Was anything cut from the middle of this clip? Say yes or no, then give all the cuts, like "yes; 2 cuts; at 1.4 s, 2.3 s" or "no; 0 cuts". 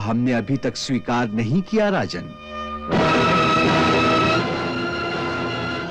no; 0 cuts